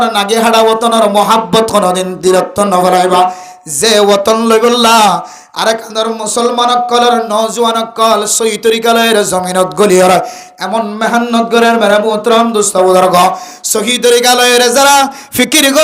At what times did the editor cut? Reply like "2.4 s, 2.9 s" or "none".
none